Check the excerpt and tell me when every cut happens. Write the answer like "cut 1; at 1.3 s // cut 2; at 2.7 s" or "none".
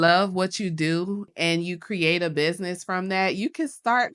cut 1; at 1.3 s